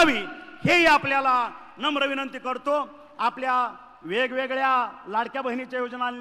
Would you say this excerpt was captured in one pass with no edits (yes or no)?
yes